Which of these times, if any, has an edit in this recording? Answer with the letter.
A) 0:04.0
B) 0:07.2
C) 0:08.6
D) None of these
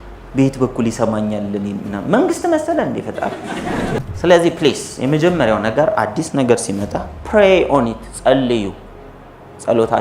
A